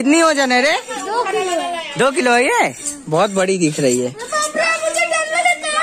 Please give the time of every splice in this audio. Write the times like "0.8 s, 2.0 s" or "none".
none